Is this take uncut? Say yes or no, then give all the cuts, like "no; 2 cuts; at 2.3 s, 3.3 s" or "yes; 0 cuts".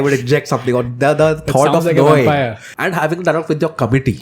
no; 1 cut; at 2.7 s